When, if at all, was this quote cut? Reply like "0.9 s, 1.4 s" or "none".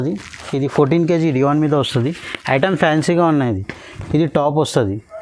none